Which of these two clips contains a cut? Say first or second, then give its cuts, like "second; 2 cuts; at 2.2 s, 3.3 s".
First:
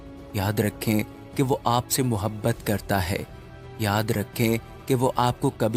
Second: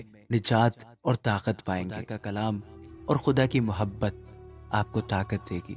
second; 1 cut; at 2.2 s